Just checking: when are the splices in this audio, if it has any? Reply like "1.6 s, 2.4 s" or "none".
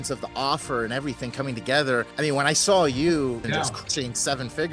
3.4 s